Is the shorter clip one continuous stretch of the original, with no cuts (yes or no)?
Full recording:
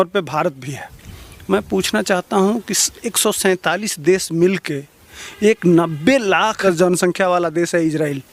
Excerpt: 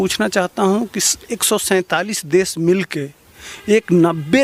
yes